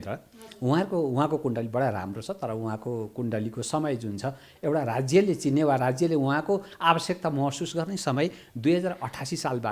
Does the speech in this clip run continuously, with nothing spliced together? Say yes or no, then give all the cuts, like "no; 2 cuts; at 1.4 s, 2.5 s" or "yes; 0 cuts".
yes; 0 cuts